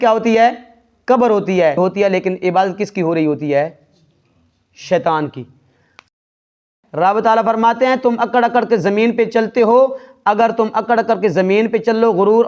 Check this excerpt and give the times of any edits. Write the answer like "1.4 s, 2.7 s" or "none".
6.5 s